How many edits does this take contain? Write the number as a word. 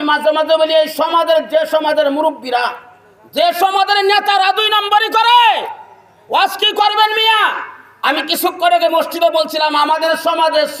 zero